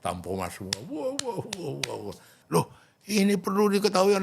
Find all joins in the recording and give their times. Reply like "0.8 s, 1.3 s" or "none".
2.3 s